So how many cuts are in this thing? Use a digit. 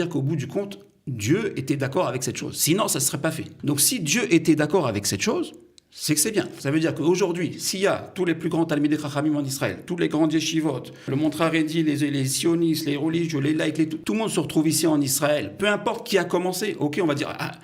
4